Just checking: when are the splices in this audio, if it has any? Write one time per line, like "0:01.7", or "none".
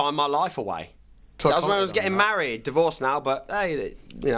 0:01.4